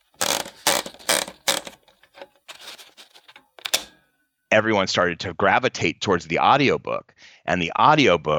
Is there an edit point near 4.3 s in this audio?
yes; 1 cut; at 4.3 s

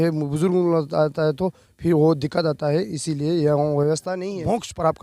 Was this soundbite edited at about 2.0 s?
no; 1 cut; at 4.1 s

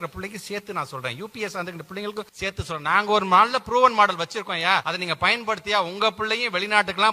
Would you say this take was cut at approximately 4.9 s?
yes; 2 cuts; at 2.3 s, 4.9 s

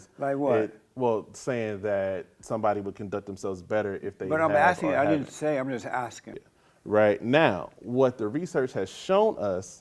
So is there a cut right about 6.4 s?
yes; 1 cut; at 6.4 s

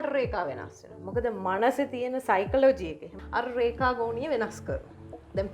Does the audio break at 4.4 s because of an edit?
no; 1 cut; at 3.2 s

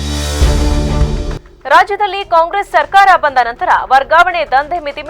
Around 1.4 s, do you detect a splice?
yes; 1 cut; at 1.4 s

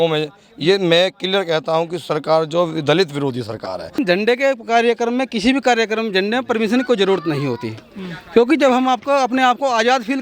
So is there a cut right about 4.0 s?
yes; 1 cut; at 4.0 s

